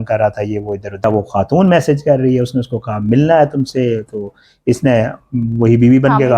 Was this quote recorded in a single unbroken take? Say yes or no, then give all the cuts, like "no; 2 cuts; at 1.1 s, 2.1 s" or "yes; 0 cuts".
no; 1 cut; at 1.0 s